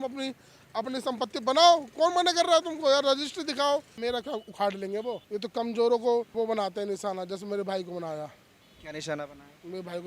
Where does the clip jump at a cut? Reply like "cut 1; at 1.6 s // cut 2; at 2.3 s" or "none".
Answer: cut 1; at 3.9 s // cut 2; at 5.2 s // cut 3; at 6.3 s